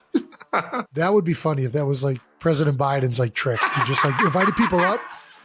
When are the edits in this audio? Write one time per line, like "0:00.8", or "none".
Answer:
0:00.9
0:02.3